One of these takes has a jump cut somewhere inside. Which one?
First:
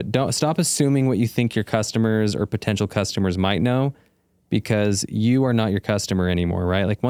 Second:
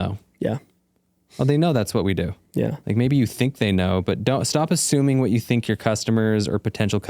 second; 1 cut; at 2.8 s

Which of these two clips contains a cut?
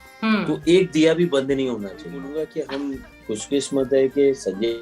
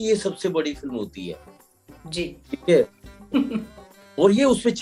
first; 1 cut; at 2.2 s

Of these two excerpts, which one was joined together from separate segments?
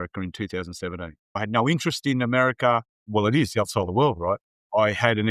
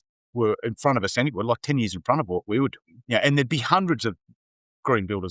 first; 2 cuts; at 1.4 s, 3.1 s

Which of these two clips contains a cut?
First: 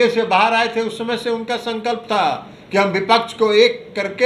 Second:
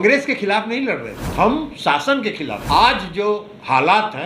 second; 2 cuts; at 1.2 s, 2.6 s

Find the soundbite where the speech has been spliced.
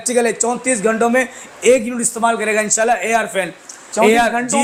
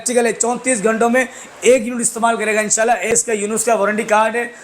second; 1 cut; at 3.1 s

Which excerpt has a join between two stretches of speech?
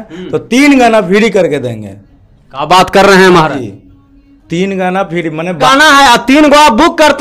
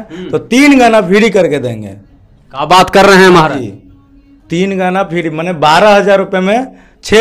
first; 1 cut; at 5.7 s

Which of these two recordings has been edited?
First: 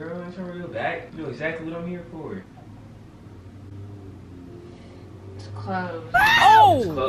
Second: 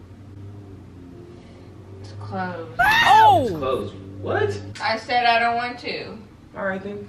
second; 1 cut; at 4.7 s

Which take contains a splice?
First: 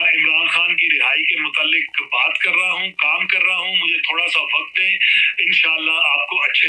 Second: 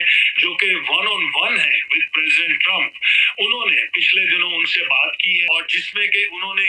second; 1 cut; at 5.5 s

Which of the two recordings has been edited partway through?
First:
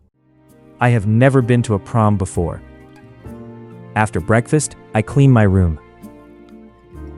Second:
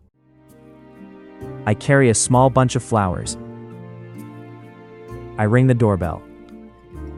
first; 2 cuts; at 0.8 s, 6.2 s

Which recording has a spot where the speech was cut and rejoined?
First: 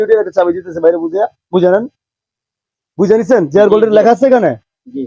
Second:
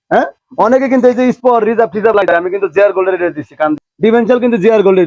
second; 1 cut; at 3.9 s

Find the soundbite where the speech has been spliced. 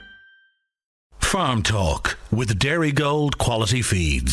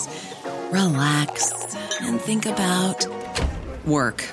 first; 1 cut; at 1.0 s

